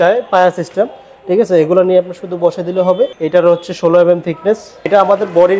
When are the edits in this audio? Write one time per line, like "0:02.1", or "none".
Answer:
0:03.2
0:04.9